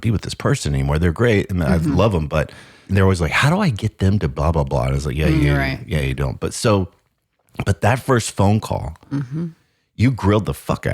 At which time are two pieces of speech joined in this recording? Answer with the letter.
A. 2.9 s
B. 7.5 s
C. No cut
A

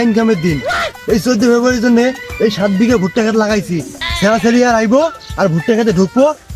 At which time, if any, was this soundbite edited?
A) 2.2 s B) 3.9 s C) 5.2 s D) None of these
D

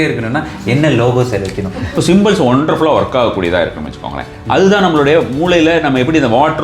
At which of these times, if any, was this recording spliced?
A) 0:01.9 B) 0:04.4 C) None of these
A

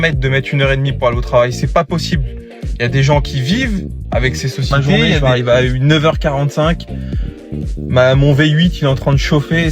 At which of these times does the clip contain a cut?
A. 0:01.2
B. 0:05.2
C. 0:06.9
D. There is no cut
B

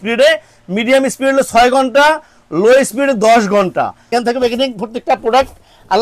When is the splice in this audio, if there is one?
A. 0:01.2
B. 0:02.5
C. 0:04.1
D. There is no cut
C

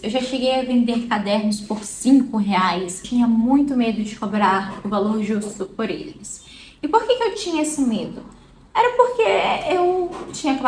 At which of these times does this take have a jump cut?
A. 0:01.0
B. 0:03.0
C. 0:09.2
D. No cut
B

